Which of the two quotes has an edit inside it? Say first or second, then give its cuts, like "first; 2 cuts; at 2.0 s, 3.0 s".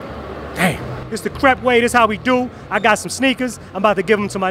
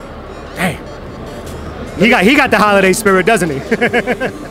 first; 1 cut; at 0.9 s